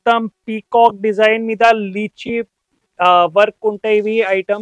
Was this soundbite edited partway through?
no; 0 cuts

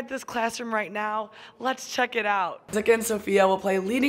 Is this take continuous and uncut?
no; 1 cut; at 2.6 s

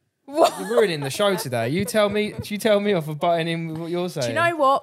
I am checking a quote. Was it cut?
no; 0 cuts

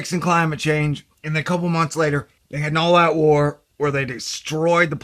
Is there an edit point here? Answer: no; 0 cuts

